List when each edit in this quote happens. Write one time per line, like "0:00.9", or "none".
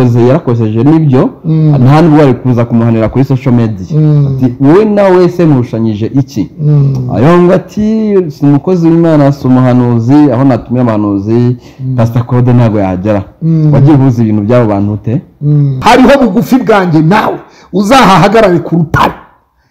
0:15.7